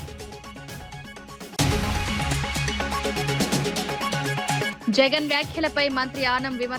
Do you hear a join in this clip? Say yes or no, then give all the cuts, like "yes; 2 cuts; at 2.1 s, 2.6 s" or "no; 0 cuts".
no; 0 cuts